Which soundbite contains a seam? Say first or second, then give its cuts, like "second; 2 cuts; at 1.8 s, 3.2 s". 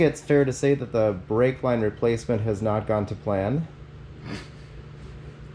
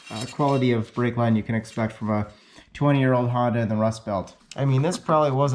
second; 1 cut; at 4.4 s